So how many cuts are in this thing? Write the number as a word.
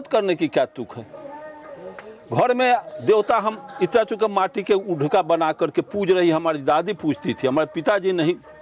zero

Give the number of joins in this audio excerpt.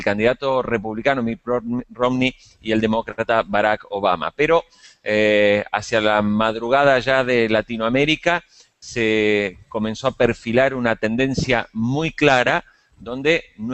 one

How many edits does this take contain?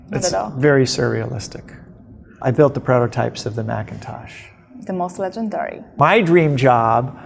two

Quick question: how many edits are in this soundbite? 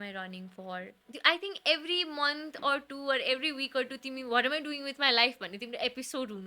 one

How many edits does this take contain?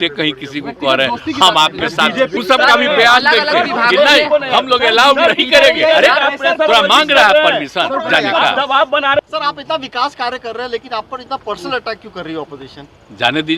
two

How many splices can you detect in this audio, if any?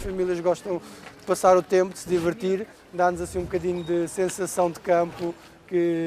one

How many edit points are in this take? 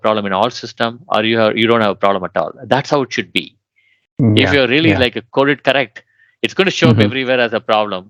zero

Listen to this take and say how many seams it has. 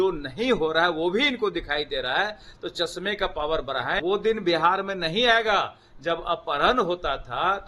one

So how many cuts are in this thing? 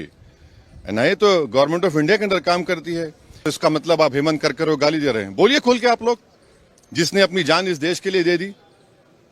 one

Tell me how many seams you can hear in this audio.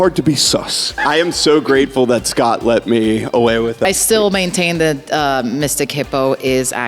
two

